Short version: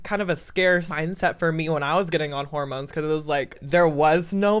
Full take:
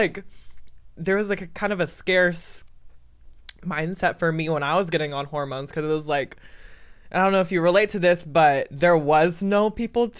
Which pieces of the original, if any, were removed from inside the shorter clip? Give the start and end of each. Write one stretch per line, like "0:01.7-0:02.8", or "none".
0:02.4-0:03.7
0:06.4-0:08.7